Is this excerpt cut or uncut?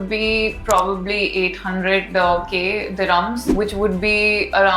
cut